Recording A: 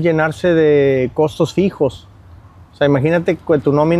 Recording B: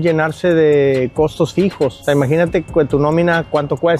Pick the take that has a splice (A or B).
B